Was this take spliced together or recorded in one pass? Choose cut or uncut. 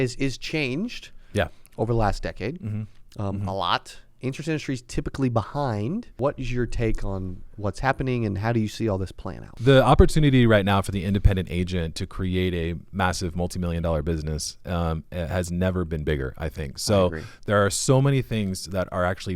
cut